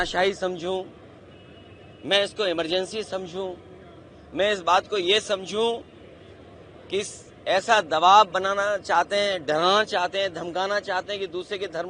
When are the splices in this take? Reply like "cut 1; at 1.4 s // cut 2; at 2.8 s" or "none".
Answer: none